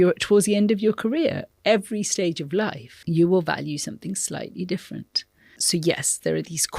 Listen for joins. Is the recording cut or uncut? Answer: cut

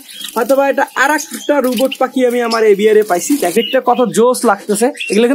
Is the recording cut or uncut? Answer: cut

